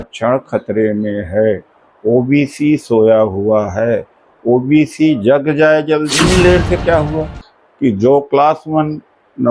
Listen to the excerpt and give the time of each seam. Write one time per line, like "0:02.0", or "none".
0:06.1